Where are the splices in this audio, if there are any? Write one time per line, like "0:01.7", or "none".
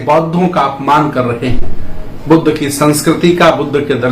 none